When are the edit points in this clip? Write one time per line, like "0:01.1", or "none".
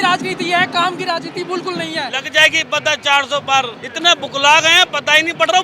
0:02.2
0:03.8